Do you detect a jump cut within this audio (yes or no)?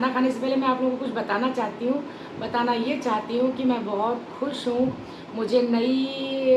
no